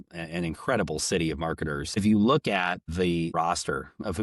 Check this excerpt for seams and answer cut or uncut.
cut